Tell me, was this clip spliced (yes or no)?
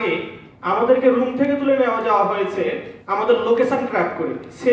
no